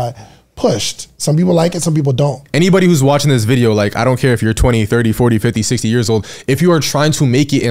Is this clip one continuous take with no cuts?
no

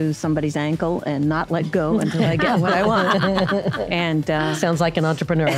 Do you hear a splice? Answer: no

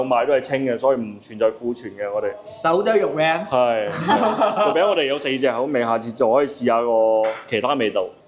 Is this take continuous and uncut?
yes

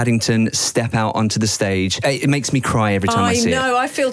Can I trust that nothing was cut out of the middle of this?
no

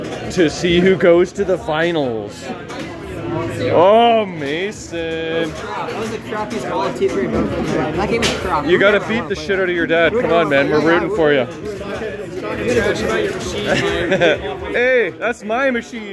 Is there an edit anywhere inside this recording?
no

